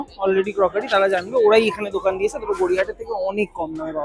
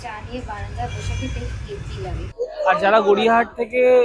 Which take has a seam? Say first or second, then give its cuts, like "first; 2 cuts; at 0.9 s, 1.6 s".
second; 1 cut; at 2.3 s